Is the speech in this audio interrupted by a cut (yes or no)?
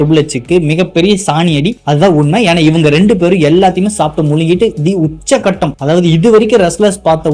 no